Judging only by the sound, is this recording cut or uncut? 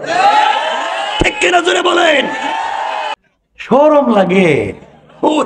cut